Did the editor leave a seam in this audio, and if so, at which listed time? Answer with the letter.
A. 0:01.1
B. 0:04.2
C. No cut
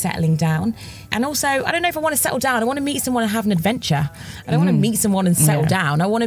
A